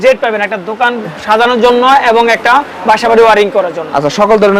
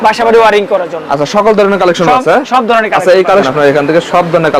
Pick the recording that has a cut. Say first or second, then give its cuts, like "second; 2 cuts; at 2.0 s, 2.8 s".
second; 1 cut; at 3.4 s